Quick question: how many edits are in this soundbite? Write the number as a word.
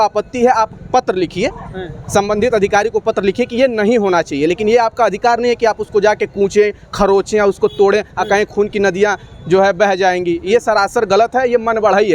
zero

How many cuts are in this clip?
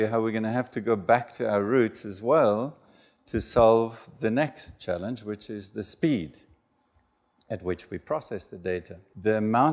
one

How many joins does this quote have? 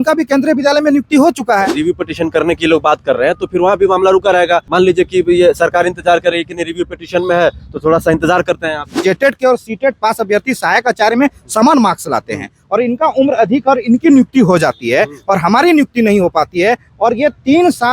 three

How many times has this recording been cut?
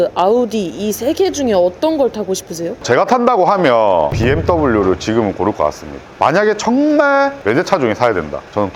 two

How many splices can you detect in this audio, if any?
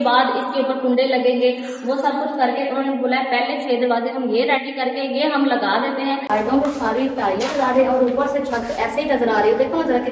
one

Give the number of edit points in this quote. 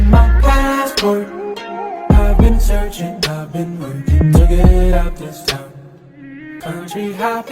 zero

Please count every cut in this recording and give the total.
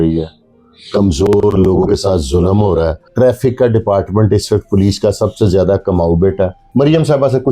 two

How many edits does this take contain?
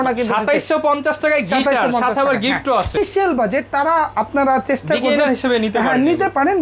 one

